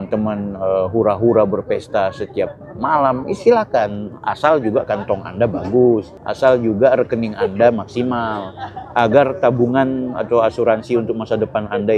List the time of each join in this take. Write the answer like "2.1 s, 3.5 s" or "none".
none